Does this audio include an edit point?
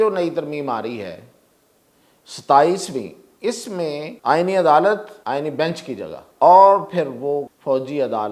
yes; 4 cuts; at 4.1 s, 5.1 s, 6.2 s, 7.5 s

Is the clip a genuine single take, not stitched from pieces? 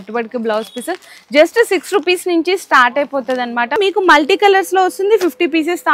no; 1 cut; at 3.8 s

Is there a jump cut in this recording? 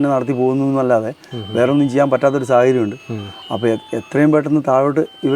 no; 0 cuts

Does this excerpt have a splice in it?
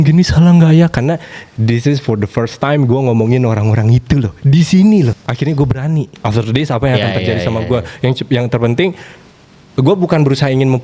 yes; 2 cuts; at 5.2 s, 6.1 s

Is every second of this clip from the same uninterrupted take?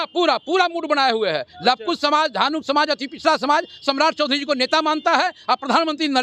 yes; 0 cuts

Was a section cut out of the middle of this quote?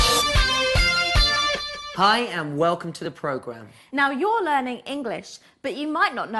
no; 0 cuts

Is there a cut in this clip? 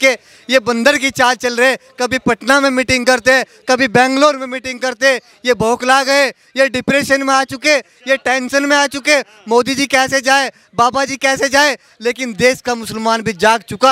no; 0 cuts

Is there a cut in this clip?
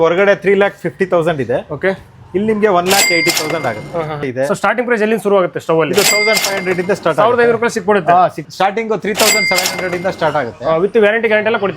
yes; 2 cuts; at 4.3 s, 8.4 s

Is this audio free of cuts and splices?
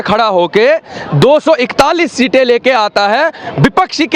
yes; 0 cuts

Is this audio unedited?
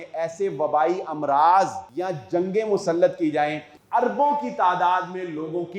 no; 2 cuts; at 1.9 s, 3.7 s

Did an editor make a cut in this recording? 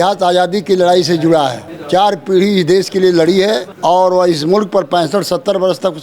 yes; 2 cuts; at 1.7 s, 3.7 s

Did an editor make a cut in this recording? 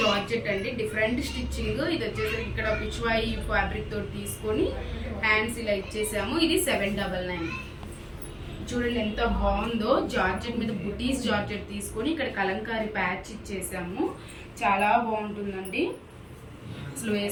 no; 0 cuts

